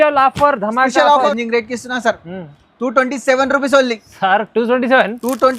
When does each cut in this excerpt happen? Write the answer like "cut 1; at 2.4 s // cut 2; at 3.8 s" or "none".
cut 1; at 1.1 s